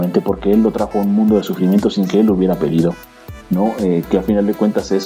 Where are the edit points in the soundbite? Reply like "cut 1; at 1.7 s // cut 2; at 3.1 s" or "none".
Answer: none